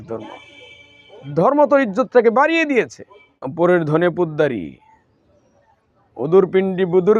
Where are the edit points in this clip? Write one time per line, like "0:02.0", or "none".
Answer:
0:03.5